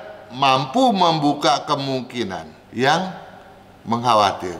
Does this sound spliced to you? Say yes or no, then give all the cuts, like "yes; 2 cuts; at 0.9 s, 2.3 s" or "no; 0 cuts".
yes; 1 cut; at 2.6 s